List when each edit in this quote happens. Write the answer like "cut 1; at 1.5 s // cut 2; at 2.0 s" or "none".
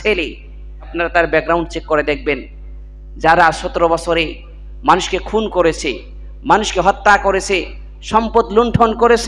cut 1; at 0.9 s